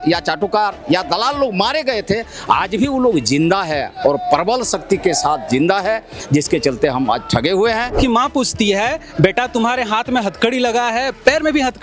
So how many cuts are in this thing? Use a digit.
1